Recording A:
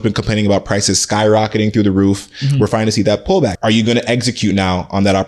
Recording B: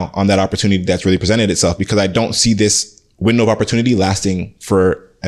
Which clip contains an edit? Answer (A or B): A